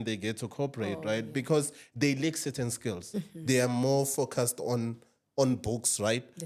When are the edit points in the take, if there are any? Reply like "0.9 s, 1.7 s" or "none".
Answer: none

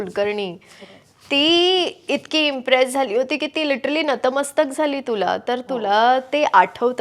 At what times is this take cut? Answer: none

